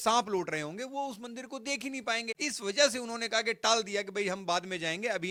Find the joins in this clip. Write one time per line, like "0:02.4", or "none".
none